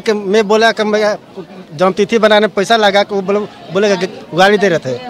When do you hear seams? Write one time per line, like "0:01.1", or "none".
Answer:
none